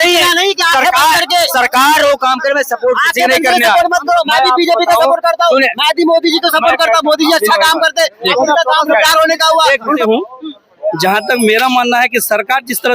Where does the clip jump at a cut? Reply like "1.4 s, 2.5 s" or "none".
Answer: 10.0 s

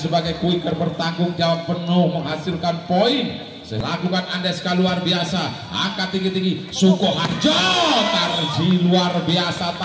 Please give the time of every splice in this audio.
3.7 s

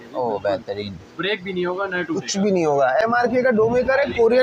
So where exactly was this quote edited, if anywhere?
3.0 s

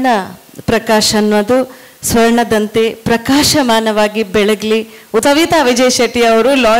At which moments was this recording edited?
5.2 s

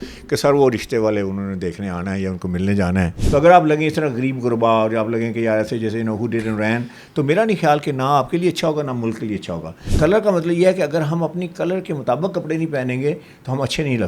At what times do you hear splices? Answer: 3.2 s, 9.9 s

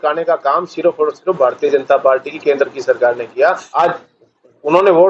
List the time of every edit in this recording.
3.6 s

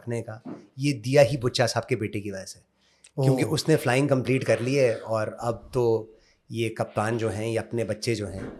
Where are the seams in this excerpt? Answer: none

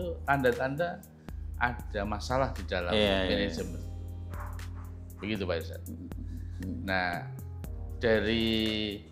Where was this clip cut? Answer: none

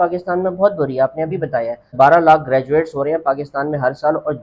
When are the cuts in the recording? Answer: 1.9 s

